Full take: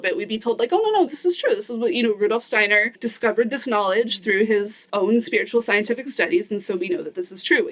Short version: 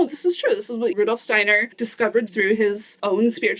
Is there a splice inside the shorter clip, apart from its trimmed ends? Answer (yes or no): yes